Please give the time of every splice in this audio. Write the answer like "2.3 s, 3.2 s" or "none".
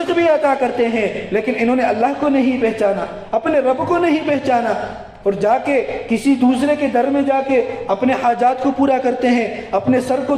none